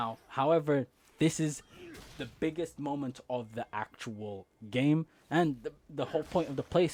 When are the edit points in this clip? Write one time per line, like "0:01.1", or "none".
none